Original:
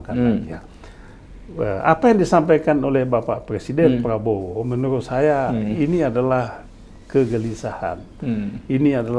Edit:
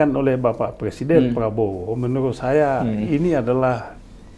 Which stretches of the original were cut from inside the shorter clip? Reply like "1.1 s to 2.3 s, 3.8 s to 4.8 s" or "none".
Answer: none